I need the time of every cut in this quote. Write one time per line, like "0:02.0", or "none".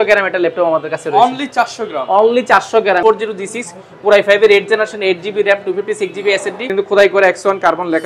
0:03.0
0:06.6